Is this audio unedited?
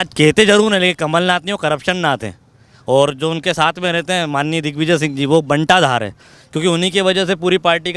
yes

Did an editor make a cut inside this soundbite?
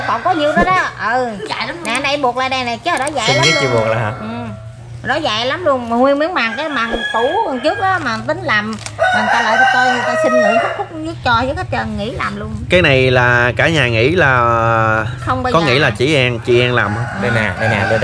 no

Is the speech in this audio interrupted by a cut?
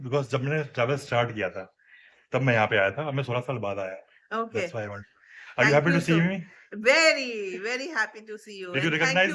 no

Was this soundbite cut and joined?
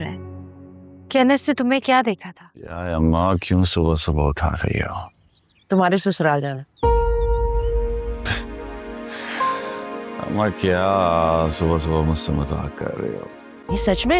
yes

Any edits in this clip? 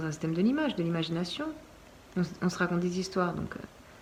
no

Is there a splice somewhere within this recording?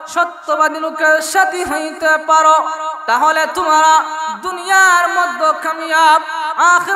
no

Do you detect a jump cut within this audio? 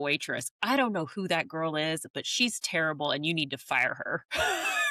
no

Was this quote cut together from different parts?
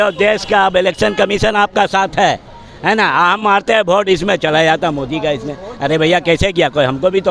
no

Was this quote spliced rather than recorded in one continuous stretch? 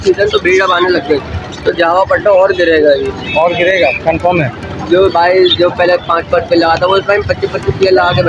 no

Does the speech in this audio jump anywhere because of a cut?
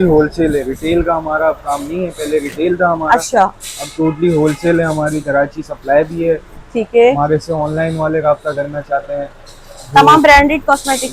no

